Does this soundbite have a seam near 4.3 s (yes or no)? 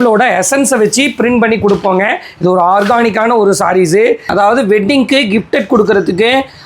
yes